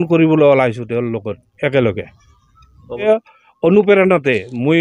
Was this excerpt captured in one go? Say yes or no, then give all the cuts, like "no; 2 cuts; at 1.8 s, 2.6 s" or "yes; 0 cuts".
no; 1 cut; at 3.0 s